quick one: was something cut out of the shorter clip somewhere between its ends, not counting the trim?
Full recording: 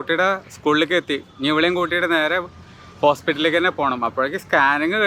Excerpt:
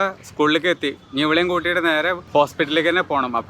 yes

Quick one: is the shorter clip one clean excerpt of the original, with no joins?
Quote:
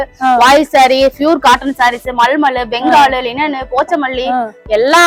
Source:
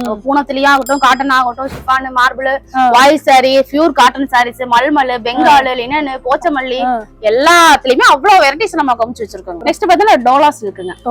yes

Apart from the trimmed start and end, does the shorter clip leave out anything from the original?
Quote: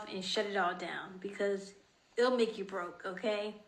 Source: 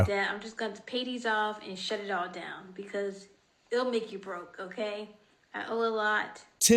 no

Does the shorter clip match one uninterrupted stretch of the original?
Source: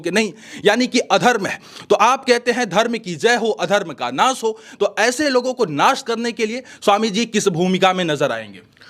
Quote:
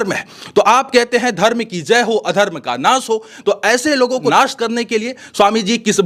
no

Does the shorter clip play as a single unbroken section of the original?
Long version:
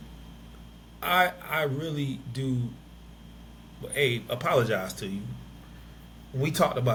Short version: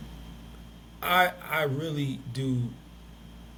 yes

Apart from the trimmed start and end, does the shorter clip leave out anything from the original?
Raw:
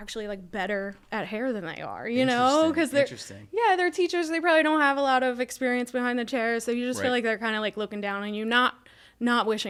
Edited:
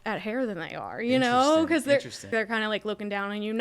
yes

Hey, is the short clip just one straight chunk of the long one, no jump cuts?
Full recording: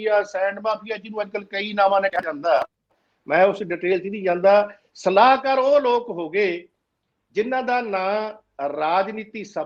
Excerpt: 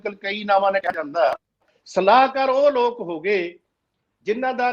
no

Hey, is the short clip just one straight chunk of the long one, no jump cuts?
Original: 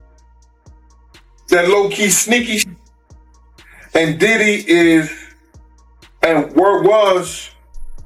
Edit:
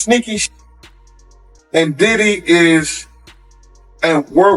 yes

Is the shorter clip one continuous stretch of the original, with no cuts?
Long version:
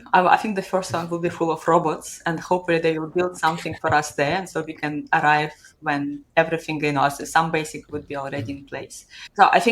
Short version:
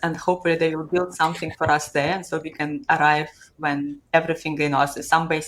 yes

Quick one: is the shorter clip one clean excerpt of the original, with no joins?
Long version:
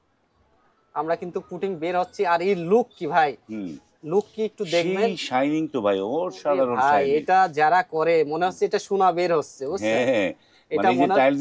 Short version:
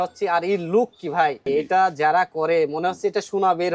no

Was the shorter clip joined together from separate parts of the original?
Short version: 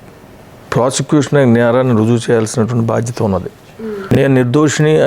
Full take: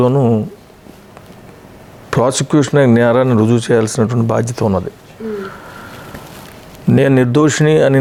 yes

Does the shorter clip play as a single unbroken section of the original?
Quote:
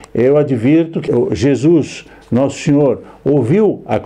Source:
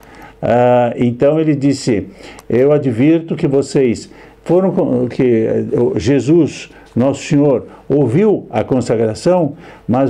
no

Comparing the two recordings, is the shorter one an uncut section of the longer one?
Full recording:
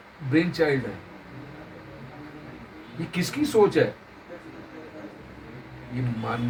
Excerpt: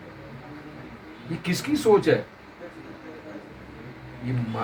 yes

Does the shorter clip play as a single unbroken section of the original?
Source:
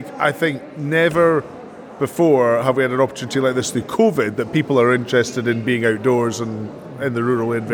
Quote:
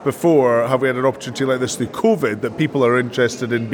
yes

